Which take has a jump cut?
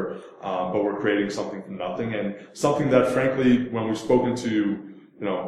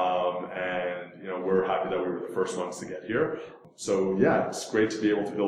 second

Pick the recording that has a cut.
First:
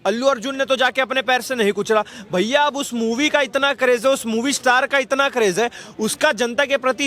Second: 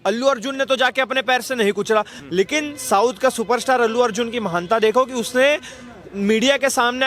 second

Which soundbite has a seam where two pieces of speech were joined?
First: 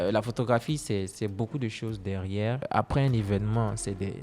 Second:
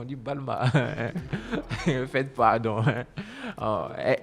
first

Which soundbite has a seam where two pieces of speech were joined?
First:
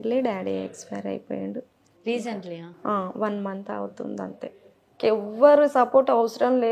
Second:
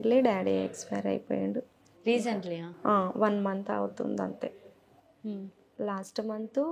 first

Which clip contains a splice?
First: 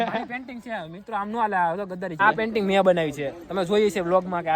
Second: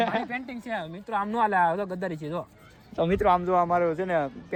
first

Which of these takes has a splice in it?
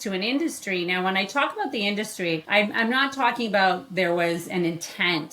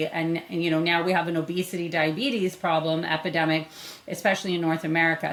first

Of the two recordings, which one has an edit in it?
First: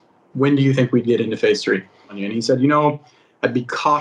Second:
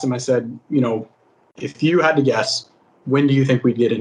first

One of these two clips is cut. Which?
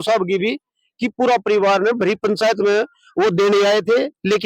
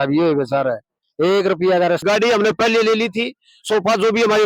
second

